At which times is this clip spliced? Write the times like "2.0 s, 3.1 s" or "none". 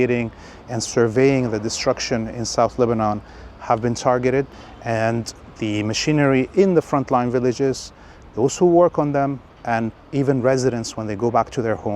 4.6 s